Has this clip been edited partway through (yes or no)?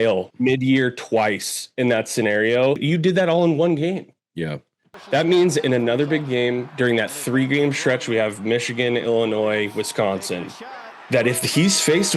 yes